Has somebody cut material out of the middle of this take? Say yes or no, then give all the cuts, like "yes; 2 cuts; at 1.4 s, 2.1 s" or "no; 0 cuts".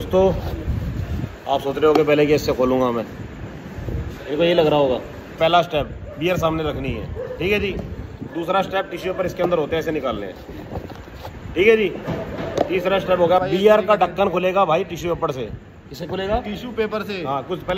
yes; 2 cuts; at 5.3 s, 13.4 s